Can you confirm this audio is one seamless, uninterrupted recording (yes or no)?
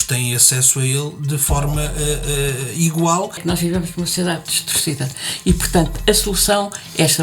no